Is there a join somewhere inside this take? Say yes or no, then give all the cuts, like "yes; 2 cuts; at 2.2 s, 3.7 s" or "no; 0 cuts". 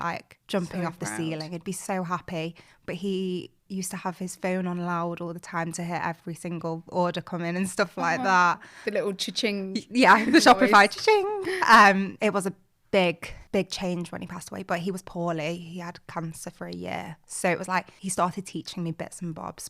no; 0 cuts